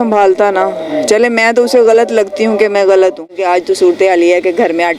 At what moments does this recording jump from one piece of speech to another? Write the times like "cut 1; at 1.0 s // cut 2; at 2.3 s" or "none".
cut 1; at 3.3 s